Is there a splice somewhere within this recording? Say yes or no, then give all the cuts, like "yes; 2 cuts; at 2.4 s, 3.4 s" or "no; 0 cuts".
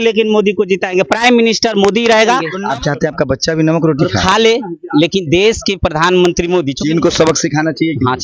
yes; 2 cuts; at 2.5 s, 6.7 s